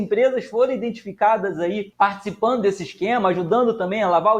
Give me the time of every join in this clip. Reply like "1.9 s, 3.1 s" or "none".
1.9 s